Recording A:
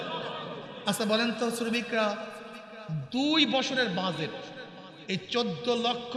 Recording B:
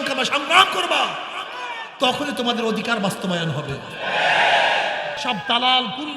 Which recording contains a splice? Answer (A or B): B